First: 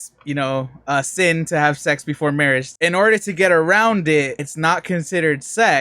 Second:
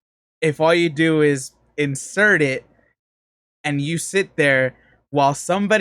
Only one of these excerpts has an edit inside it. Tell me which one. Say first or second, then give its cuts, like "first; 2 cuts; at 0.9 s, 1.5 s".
first; 2 cuts; at 2.7 s, 4.4 s